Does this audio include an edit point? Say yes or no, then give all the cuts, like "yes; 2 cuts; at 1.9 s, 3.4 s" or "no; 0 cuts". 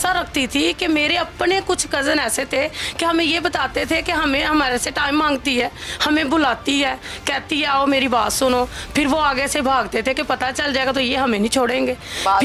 no; 0 cuts